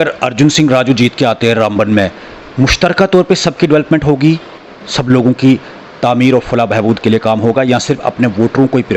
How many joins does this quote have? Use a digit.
0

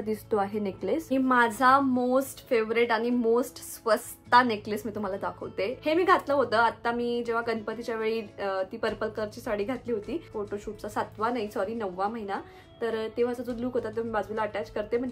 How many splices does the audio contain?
3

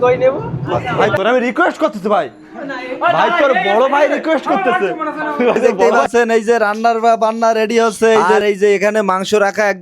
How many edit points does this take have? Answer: 3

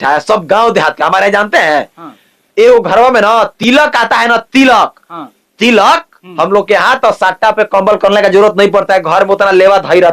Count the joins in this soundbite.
0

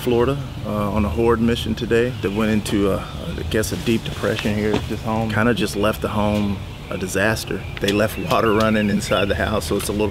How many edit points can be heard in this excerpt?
3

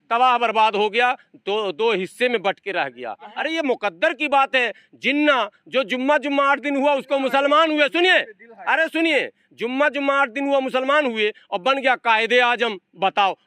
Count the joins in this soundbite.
1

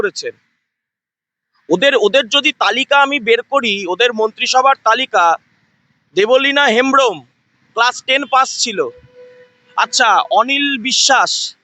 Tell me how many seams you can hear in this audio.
0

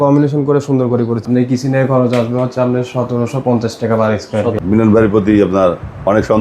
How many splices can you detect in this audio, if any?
2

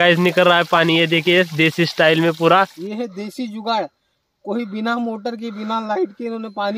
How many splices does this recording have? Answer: 1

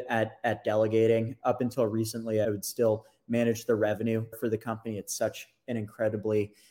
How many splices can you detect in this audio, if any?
3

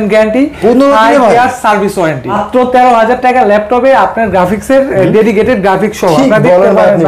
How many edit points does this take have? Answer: 1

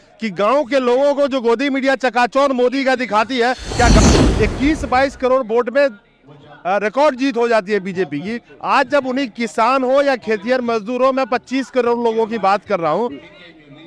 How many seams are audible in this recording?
1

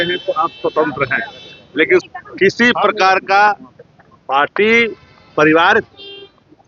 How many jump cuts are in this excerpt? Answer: 1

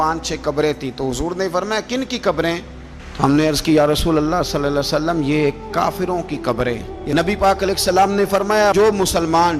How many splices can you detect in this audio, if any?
1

